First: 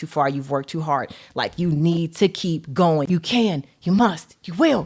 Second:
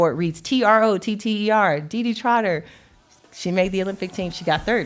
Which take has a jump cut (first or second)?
first